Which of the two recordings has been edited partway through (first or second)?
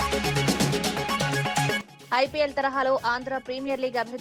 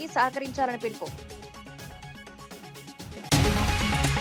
second